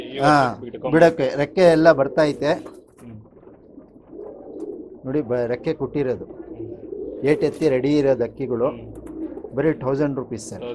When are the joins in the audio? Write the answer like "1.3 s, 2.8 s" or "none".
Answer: none